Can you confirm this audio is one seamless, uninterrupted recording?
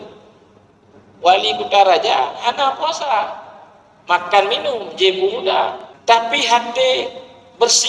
no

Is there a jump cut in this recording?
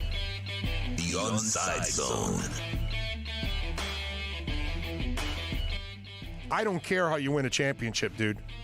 yes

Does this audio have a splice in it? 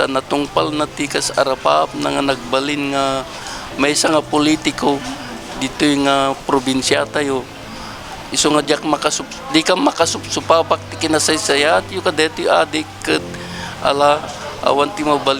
no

